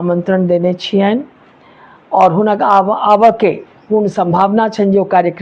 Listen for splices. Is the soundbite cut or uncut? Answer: uncut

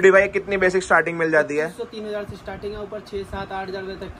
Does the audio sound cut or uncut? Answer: uncut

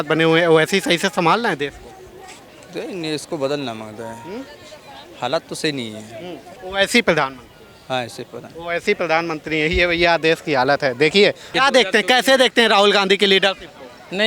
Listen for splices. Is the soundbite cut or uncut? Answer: cut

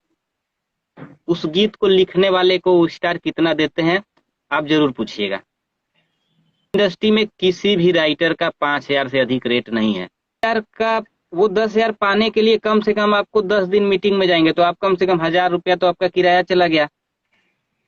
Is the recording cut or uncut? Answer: cut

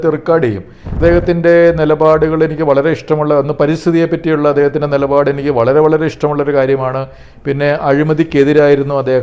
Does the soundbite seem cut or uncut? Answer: cut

